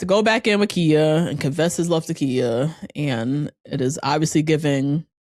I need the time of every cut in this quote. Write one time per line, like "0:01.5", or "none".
none